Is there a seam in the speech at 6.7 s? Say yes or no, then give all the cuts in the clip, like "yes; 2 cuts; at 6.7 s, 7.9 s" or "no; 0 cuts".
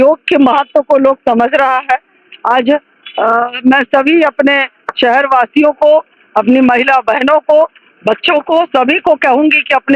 no; 0 cuts